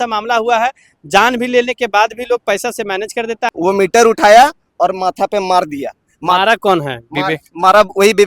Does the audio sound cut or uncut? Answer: cut